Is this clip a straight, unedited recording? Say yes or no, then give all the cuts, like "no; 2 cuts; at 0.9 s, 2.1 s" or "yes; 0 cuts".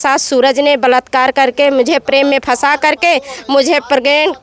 yes; 0 cuts